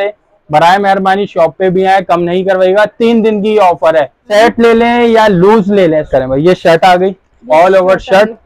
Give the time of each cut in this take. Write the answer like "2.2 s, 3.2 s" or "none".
4.2 s, 6.1 s